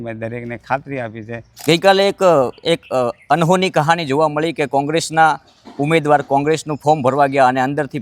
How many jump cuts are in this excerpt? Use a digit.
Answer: 1